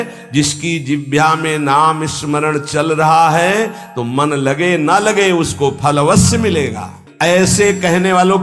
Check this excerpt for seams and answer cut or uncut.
cut